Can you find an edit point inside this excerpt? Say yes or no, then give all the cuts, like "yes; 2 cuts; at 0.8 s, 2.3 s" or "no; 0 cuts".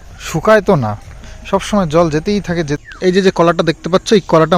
yes; 1 cut; at 2.8 s